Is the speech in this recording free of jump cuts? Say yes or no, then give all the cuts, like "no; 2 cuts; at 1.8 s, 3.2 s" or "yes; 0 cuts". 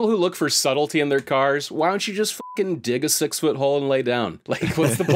yes; 0 cuts